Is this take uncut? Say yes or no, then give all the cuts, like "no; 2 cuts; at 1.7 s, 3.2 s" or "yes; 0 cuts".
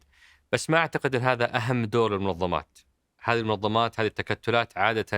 yes; 0 cuts